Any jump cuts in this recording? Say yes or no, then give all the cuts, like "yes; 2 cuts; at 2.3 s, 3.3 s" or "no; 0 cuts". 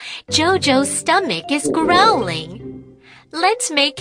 no; 0 cuts